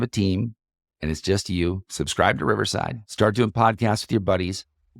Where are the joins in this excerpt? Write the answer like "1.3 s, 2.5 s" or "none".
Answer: 1.9 s, 3.0 s